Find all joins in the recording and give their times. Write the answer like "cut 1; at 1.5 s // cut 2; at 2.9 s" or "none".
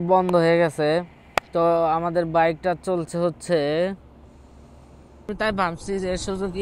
cut 1; at 5.2 s